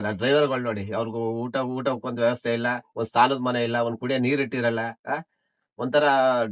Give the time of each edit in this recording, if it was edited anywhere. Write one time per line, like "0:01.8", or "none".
none

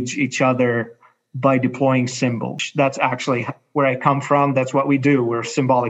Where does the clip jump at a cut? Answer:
0:02.6

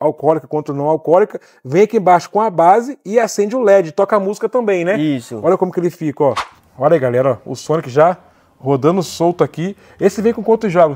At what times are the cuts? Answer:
0:06.5

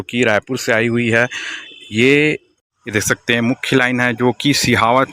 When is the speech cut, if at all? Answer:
0:02.6

